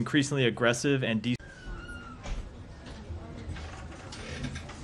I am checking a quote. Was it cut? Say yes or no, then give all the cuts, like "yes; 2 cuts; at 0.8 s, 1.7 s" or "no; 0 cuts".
no; 0 cuts